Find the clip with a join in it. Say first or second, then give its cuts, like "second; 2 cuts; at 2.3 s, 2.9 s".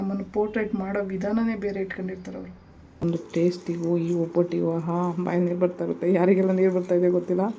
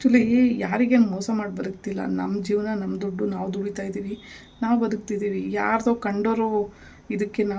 first; 1 cut; at 3.0 s